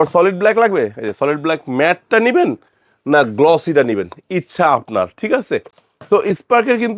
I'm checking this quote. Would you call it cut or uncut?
uncut